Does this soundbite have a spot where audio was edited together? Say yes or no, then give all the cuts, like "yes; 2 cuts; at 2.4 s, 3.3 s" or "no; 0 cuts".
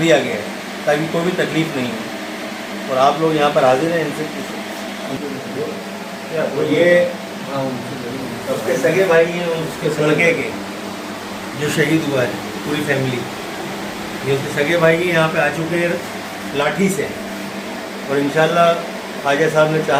no; 0 cuts